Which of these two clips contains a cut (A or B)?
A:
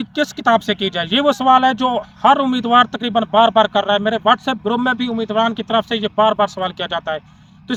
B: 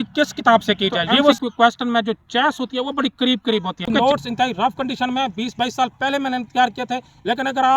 B